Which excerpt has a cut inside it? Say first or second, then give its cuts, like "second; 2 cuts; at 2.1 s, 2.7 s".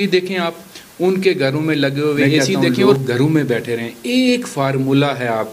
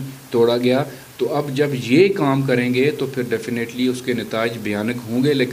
first; 1 cut; at 2.5 s